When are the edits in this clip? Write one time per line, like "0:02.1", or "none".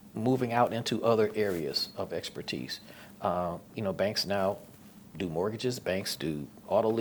none